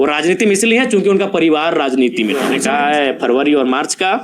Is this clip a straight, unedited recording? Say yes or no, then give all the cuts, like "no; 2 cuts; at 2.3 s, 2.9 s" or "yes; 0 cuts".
no; 1 cut; at 2.7 s